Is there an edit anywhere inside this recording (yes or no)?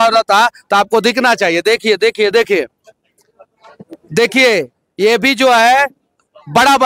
no